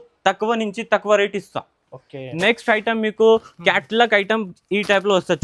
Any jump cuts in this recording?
no; 0 cuts

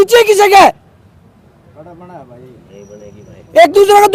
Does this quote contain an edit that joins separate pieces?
no; 0 cuts

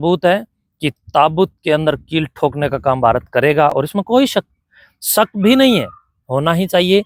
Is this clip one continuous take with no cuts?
yes; 0 cuts

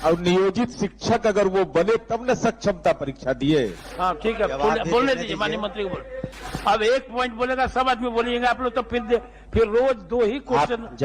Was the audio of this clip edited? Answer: yes; 1 cut; at 4.2 s

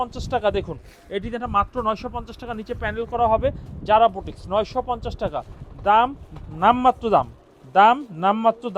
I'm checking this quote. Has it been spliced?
no; 0 cuts

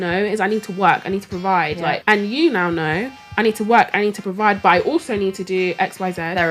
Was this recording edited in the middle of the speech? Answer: yes; 1 cut; at 2.0 s

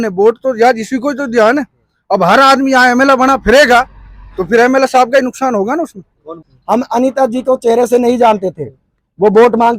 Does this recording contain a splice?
yes; 1 cut; at 6.3 s

